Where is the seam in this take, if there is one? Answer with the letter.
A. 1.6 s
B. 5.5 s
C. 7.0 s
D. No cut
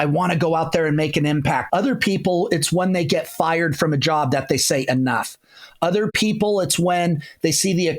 A